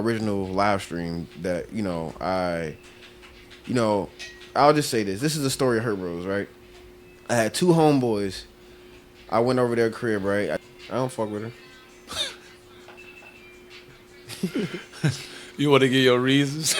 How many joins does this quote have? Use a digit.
1